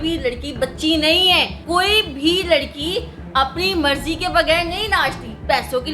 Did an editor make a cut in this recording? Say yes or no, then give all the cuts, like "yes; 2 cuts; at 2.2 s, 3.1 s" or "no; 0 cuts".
yes; 1 cut; at 1.6 s